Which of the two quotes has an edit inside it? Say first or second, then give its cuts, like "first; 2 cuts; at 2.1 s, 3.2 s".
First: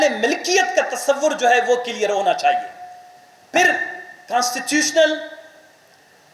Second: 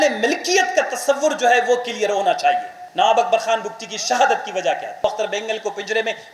second; 2 cuts; at 2.8 s, 5.0 s